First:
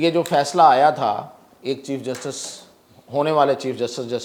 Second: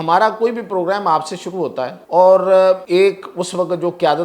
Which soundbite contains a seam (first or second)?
second